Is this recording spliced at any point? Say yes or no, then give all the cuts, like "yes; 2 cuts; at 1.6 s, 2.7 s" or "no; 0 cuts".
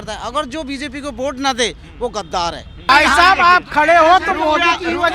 yes; 1 cut; at 2.9 s